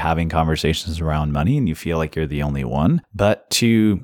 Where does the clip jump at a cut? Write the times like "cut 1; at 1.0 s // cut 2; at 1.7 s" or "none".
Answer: cut 1; at 3.1 s